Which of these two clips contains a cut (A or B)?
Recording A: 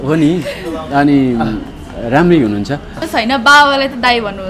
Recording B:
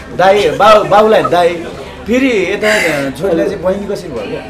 A